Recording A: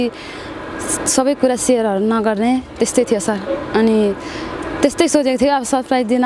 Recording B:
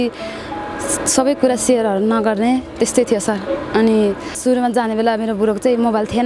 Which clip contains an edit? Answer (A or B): B